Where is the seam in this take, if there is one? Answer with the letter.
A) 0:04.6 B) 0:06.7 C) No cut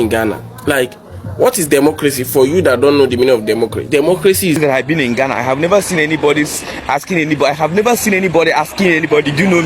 A